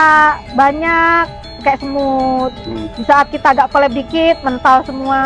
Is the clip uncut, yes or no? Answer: yes